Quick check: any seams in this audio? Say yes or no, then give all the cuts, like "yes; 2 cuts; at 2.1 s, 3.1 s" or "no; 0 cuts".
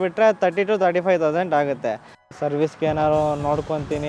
yes; 1 cut; at 2.1 s